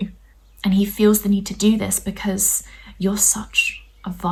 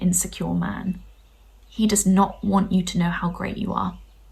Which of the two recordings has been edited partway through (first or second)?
second